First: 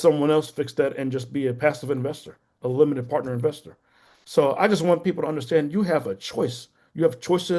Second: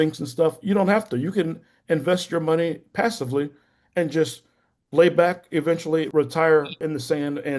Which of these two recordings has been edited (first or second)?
second